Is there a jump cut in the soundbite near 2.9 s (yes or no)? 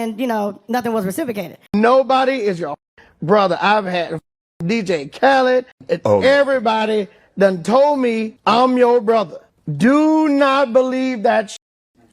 no